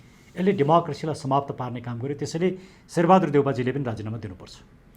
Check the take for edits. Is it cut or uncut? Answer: uncut